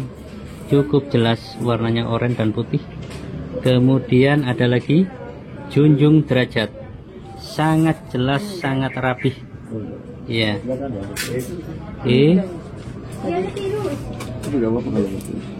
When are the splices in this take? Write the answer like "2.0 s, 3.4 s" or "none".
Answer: none